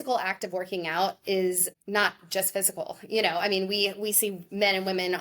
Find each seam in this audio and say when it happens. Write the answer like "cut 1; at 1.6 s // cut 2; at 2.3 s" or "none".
cut 1; at 1.7 s